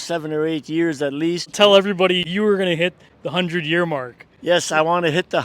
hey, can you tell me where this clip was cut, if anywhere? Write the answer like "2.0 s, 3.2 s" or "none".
1.5 s